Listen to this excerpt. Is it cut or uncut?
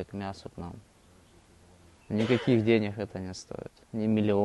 cut